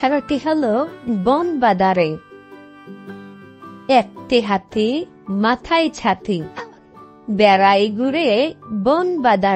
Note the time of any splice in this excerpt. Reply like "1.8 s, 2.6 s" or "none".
2.3 s, 3.8 s